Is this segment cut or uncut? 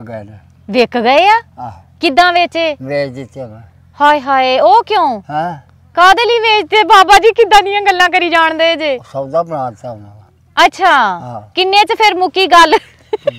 uncut